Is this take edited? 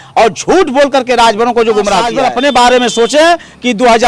yes; 1 cut; at 2.1 s

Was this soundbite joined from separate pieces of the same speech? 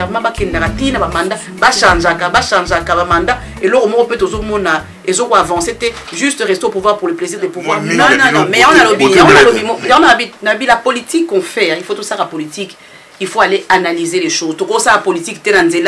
yes; 1 cut; at 7.9 s

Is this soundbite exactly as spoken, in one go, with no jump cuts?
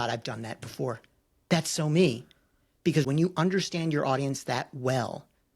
no; 1 cut; at 3.1 s

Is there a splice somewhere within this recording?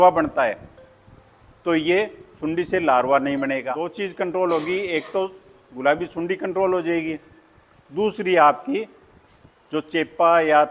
yes; 1 cut; at 3.9 s

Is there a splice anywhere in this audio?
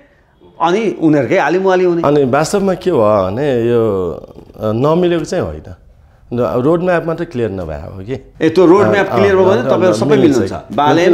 yes; 1 cut; at 8.3 s

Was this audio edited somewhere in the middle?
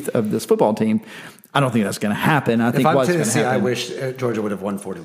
no; 0 cuts

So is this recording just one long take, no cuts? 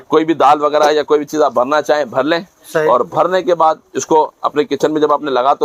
yes; 0 cuts

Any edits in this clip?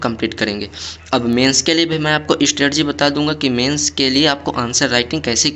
no; 0 cuts

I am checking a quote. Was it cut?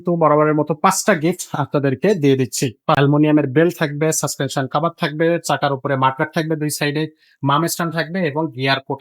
yes; 1 cut; at 3.0 s

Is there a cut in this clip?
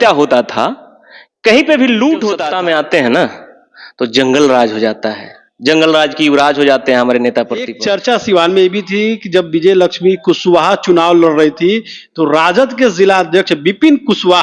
yes; 2 cuts; at 2.5 s, 7.8 s

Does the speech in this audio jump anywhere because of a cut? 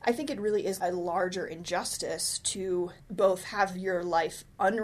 yes; 2 cuts; at 0.8 s, 3.0 s

